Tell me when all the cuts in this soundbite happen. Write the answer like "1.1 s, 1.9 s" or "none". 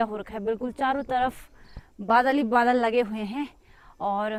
none

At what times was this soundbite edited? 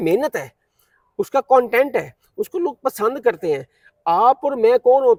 none

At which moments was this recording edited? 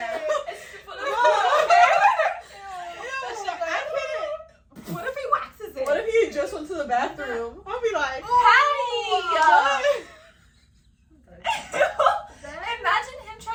none

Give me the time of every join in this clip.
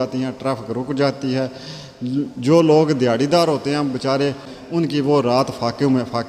4.5 s

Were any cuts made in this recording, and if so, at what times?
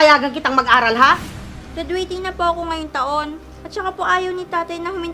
1.4 s

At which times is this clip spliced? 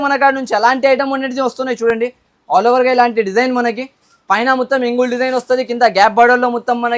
none

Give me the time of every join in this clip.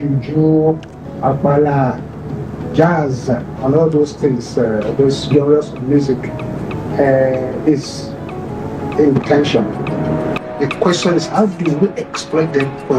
10.4 s

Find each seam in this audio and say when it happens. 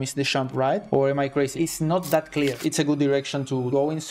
2.6 s

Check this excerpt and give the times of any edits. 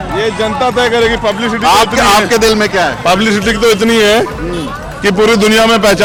none

